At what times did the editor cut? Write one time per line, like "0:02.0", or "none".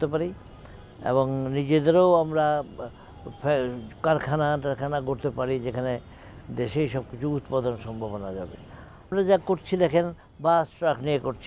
0:09.1